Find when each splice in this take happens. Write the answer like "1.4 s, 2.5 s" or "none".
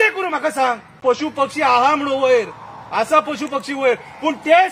1.0 s